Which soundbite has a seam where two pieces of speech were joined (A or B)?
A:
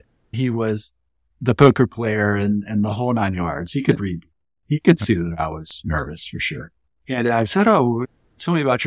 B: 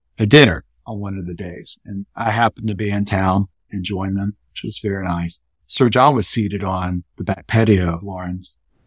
B